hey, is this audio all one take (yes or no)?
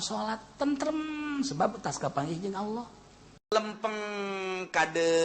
no